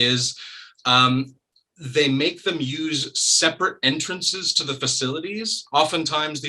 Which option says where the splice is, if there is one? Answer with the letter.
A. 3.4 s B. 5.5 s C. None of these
B